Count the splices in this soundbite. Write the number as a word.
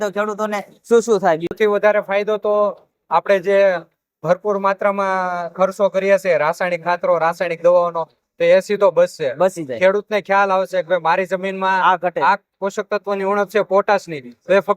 one